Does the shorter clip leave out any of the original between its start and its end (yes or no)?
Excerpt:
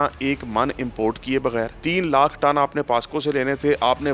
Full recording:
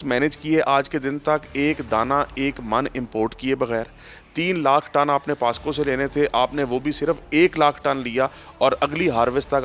yes